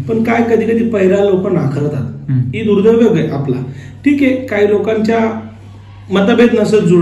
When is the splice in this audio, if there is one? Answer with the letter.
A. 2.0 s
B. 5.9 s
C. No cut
C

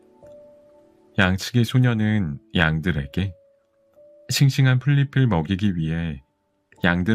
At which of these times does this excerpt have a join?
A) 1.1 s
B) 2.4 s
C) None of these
A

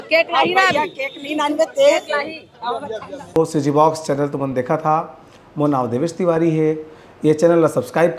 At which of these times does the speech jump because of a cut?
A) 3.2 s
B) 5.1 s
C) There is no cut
A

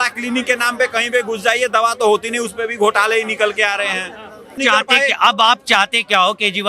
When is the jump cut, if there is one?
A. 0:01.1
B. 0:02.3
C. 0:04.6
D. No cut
C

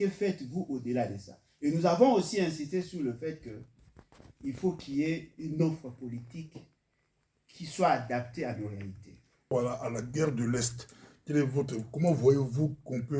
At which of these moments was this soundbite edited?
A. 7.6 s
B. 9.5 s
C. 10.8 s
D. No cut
B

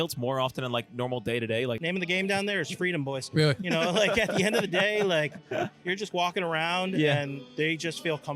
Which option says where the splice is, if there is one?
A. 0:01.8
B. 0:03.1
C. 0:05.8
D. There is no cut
A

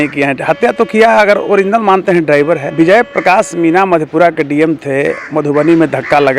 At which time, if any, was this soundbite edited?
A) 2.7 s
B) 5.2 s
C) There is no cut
A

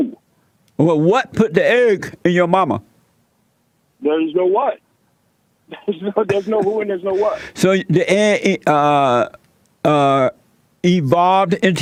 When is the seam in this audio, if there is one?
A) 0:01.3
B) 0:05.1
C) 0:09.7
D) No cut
D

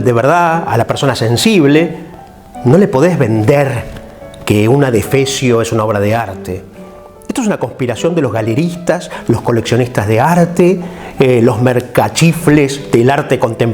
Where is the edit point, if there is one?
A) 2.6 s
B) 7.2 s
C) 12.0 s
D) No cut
B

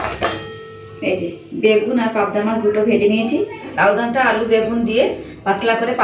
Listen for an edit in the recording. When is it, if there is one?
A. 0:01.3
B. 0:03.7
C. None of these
B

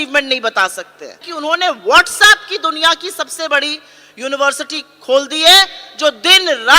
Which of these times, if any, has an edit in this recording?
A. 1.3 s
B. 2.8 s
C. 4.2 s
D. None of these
A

